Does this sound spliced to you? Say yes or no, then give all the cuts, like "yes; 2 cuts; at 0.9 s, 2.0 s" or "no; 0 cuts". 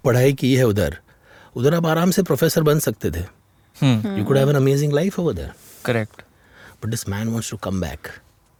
no; 0 cuts